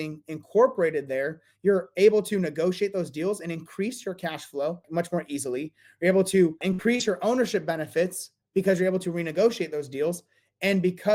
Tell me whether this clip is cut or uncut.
uncut